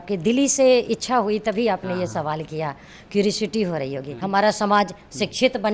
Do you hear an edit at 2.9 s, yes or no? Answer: no